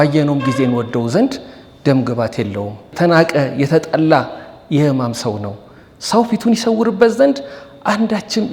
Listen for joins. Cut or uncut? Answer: uncut